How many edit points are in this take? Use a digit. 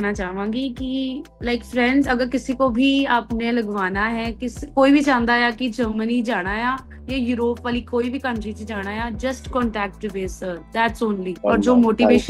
2